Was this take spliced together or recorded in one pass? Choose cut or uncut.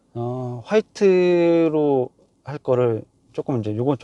uncut